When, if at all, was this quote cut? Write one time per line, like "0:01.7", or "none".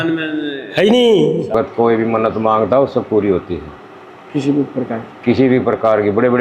0:01.5